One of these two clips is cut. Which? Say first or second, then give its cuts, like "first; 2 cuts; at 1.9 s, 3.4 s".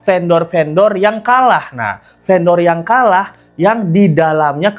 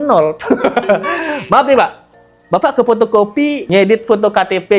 second; 1 cut; at 3.6 s